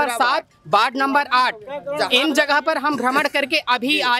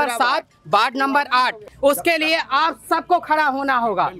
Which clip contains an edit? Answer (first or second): second